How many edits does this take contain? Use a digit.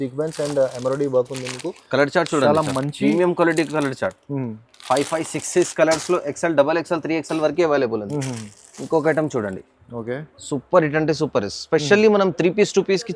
0